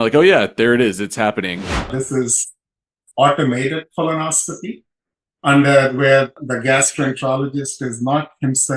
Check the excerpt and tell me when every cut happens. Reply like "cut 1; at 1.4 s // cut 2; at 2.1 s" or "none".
cut 1; at 1.7 s // cut 2; at 6.3 s

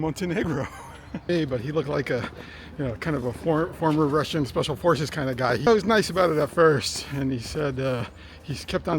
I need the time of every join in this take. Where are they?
cut 1; at 1.3 s // cut 2; at 5.7 s

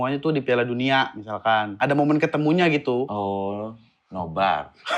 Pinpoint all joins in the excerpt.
cut 1; at 1.7 s // cut 2; at 3.1 s

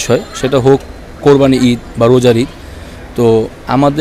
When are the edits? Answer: none

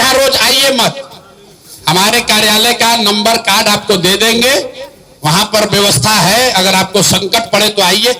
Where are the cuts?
none

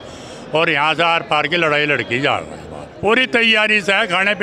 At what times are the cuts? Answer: cut 1; at 2.9 s

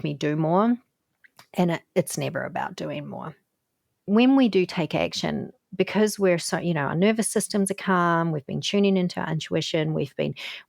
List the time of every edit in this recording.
cut 1; at 4.1 s

